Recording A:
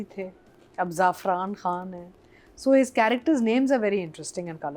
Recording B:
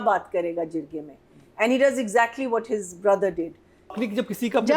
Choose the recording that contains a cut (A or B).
B